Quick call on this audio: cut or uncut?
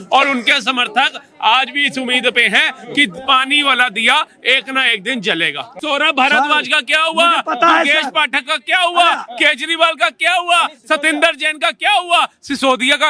cut